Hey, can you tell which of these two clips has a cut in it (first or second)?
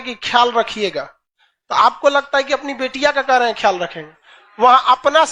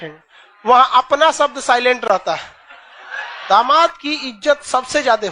second